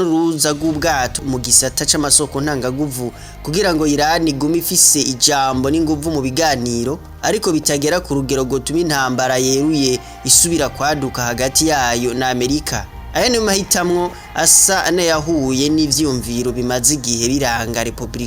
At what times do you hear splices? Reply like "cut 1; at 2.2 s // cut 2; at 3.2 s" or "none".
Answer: cut 1; at 1.2 s